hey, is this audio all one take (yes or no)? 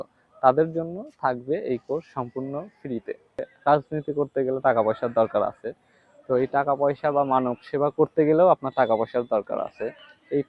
no